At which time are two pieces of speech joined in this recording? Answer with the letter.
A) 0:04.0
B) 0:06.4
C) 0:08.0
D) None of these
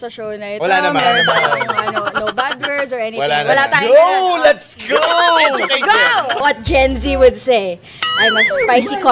B